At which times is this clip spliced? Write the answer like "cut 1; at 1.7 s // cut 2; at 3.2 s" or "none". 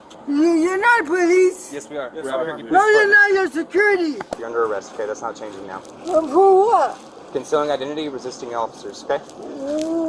cut 1; at 4.4 s